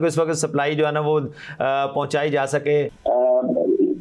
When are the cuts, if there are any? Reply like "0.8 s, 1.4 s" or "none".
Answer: 2.9 s

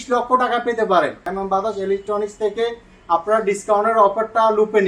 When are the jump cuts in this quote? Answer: 1.3 s

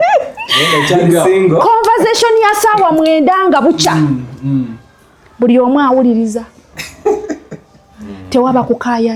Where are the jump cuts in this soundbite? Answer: none

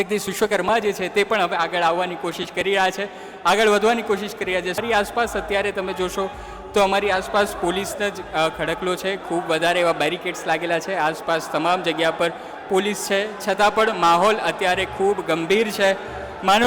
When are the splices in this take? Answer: 4.8 s

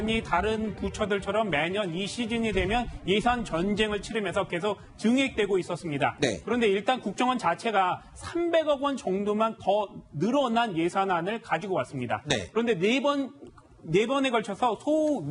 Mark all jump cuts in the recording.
7.6 s

